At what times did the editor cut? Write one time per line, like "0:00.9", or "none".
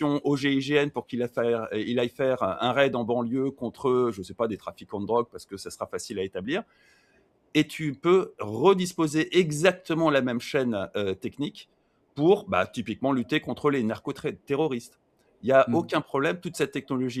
none